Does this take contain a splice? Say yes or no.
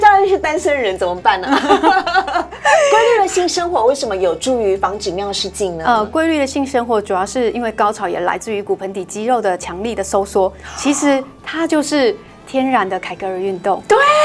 no